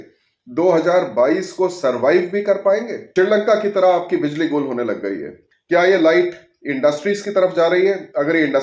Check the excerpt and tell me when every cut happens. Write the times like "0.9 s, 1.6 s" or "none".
3.0 s